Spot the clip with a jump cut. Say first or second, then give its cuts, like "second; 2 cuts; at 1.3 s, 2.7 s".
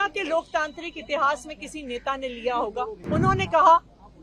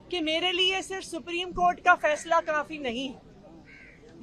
first; 1 cut; at 3.0 s